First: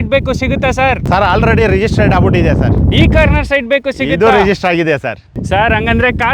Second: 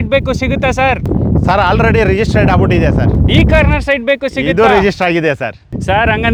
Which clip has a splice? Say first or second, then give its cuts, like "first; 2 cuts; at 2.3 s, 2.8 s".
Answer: first; 1 cut; at 1.1 s